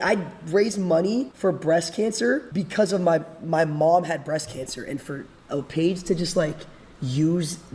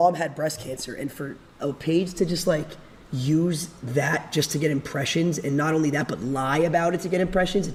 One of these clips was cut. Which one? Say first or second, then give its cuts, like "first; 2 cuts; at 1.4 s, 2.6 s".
first; 2 cuts; at 1.3 s, 2.5 s